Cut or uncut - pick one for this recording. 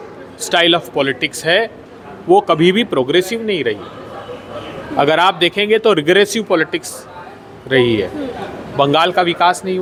uncut